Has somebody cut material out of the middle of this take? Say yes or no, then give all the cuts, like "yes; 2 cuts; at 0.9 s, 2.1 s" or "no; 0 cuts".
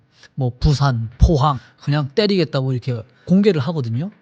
yes; 2 cuts; at 1.6 s, 3.2 s